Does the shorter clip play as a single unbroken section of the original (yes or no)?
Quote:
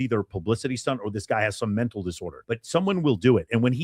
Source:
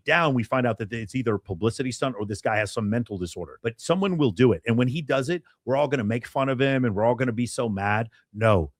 yes